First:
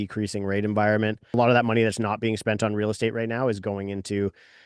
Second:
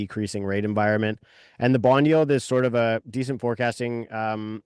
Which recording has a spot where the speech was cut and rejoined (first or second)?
first